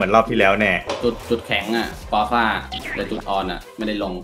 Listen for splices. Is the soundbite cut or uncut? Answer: uncut